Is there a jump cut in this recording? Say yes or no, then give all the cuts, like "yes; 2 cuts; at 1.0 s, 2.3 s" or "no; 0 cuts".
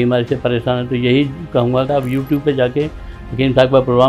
yes; 1 cut; at 1.9 s